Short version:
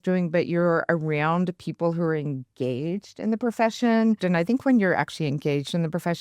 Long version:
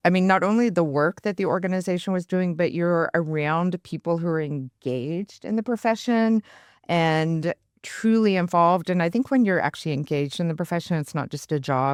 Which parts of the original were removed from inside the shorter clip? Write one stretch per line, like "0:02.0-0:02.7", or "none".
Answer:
0:06.5-0:08.9